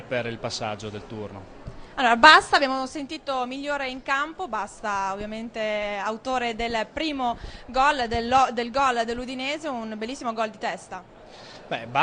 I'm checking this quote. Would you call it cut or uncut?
cut